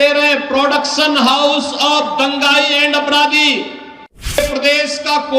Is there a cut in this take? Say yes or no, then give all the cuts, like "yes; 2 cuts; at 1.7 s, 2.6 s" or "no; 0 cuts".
yes; 1 cut; at 4.4 s